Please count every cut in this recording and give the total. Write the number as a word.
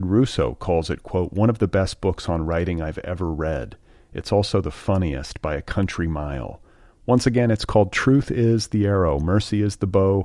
zero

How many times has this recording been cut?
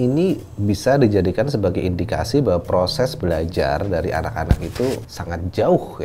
one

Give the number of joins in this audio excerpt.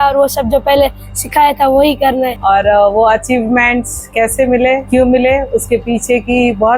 one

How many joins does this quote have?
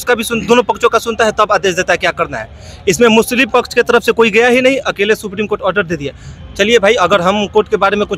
zero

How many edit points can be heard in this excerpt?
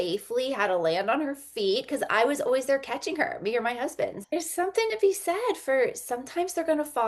one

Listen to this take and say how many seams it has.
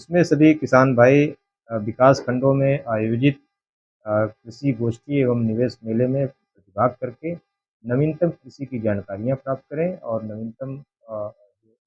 zero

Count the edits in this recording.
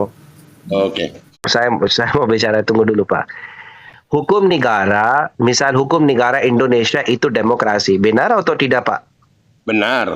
one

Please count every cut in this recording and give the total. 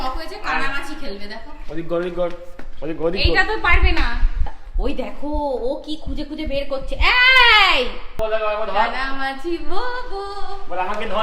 zero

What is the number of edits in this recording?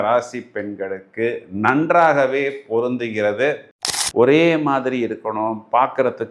one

